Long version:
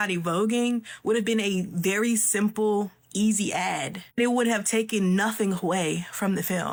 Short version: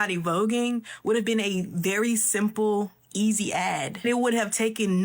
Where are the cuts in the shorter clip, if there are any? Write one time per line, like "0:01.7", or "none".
0:03.9